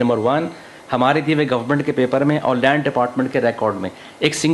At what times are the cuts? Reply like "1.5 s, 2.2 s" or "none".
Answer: none

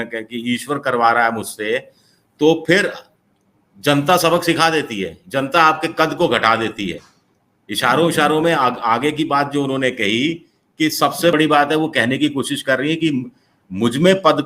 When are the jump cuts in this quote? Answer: 11.3 s

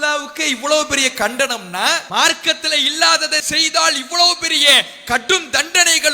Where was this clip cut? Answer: 2.0 s

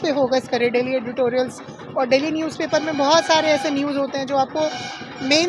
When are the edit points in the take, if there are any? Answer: none

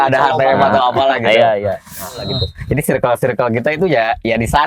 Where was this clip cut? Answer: 2.4 s

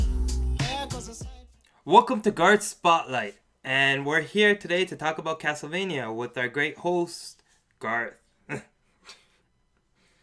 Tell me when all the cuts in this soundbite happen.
none

